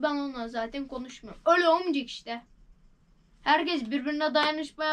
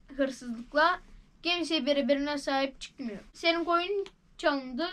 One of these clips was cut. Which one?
second; 1 cut; at 3.3 s

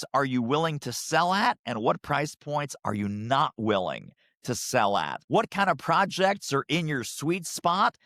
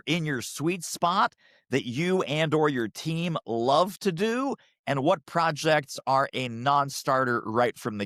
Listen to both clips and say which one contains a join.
first; 1 cut; at 5.2 s

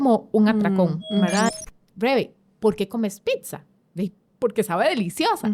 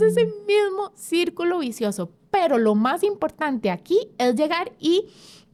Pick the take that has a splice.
first; 1 cut; at 1.5 s

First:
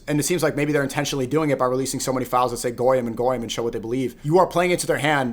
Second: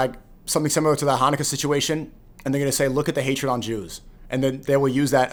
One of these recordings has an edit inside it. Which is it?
first; 1 cut; at 4.2 s

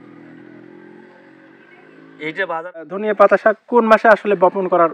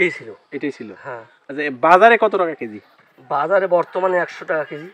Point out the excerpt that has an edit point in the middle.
first; 1 cut; at 2.8 s

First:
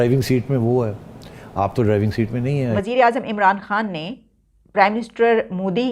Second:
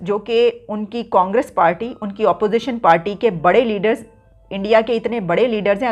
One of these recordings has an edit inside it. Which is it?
first; 1 cut; at 2.8 s

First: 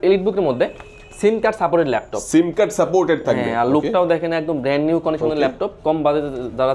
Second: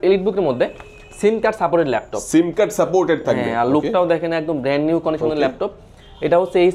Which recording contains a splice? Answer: first; 1 cut; at 5.7 s

